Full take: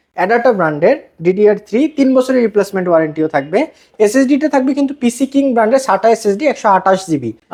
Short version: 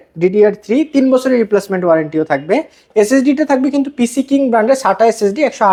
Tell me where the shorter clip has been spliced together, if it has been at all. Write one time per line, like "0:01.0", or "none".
none